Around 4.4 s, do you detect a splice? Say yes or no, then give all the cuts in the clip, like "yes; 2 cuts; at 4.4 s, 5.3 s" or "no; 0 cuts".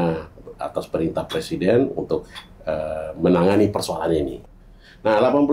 yes; 1 cut; at 4.4 s